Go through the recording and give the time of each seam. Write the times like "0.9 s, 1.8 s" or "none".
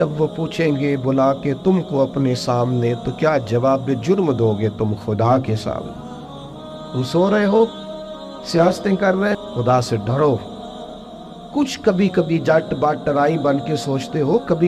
9.4 s